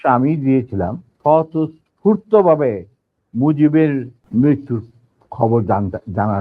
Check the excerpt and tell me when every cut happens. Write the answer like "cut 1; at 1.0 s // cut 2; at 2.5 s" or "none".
cut 1; at 1.0 s // cut 2; at 4.2 s